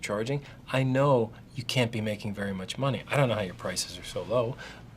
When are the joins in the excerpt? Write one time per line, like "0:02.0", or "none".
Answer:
0:03.0